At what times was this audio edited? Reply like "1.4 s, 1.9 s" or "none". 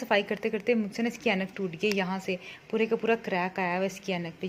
none